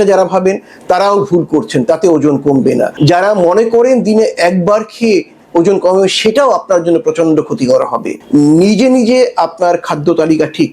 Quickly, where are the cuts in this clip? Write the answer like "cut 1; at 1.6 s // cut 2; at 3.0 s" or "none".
cut 1; at 2.9 s // cut 2; at 8.1 s